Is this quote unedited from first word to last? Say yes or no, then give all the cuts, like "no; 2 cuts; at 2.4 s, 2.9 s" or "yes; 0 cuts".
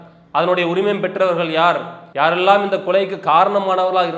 yes; 0 cuts